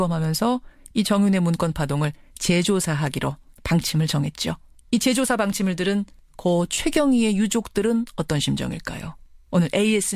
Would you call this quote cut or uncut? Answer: cut